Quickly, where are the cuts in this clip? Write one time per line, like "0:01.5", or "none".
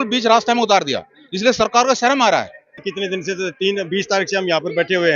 0:02.8